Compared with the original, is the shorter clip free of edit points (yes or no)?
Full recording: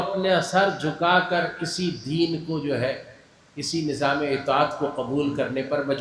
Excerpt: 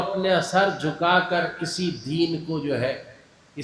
yes